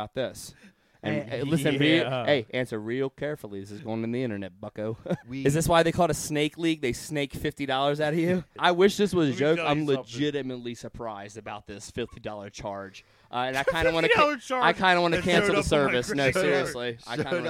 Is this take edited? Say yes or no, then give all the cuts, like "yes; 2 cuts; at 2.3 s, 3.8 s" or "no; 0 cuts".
yes; 2 cuts; at 5.3 s, 8.5 s